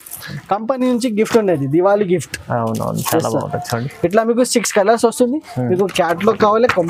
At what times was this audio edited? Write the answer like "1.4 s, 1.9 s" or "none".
none